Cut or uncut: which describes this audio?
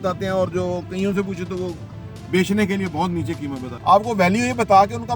cut